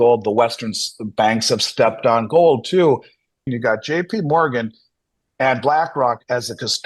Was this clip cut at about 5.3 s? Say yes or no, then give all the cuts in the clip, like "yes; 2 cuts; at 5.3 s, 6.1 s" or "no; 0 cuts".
no; 1 cut; at 3.4 s